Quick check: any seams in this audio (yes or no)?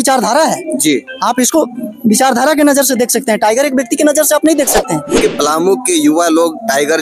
yes